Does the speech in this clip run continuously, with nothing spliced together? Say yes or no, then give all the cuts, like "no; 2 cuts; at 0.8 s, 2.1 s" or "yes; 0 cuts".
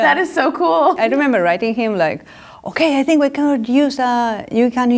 no; 1 cut; at 1.0 s